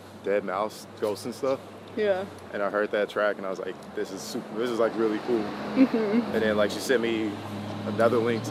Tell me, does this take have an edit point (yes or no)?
no